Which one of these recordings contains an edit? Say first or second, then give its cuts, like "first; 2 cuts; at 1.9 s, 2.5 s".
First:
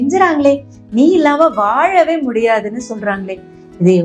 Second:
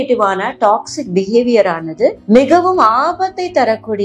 second; 1 cut; at 2.2 s